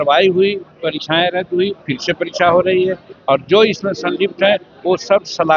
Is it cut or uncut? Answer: uncut